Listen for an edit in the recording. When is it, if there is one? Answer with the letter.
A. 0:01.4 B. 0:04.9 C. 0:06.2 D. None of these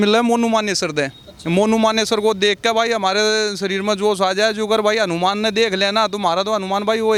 D